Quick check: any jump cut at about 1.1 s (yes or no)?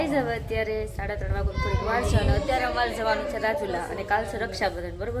no